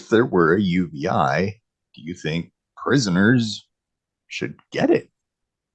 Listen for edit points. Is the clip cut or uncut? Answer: uncut